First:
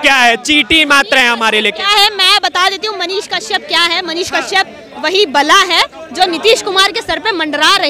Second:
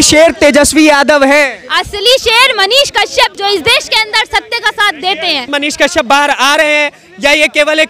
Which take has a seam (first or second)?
second